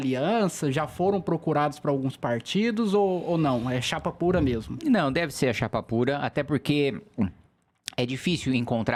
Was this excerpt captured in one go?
yes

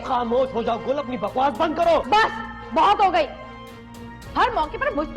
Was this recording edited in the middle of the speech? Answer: yes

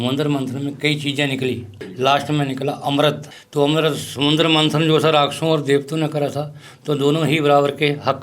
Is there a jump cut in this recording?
yes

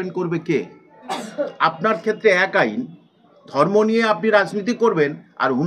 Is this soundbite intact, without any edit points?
no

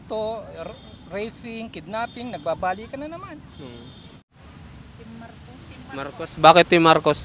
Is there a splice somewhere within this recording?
yes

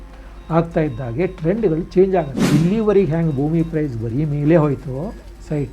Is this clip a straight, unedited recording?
no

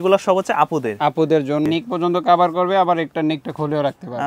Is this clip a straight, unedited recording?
no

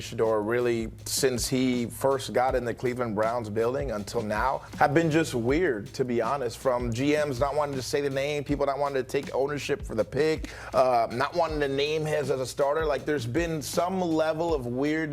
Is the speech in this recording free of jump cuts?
no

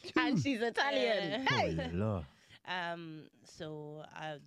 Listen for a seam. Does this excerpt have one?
no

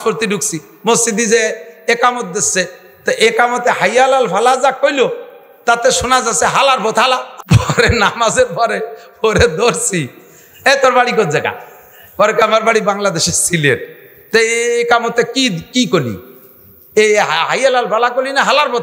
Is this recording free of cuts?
no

